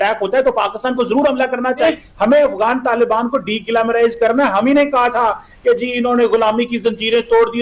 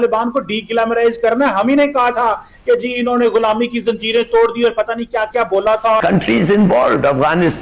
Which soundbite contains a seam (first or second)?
second